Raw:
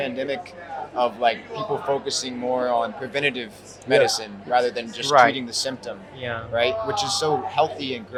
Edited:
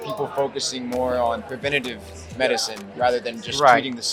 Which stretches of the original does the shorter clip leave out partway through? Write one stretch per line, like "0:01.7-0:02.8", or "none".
none